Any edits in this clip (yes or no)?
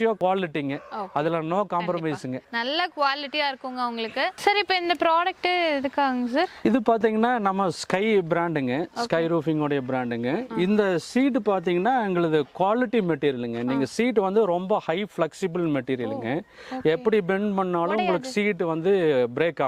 no